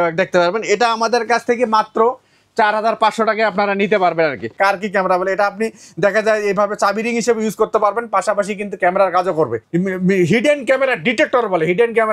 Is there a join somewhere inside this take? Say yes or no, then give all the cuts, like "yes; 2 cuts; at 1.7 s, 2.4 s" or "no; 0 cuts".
yes; 2 cuts; at 4.5 s, 9.6 s